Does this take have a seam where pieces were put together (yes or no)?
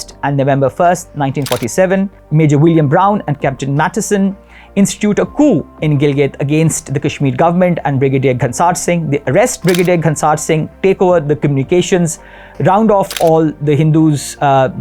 no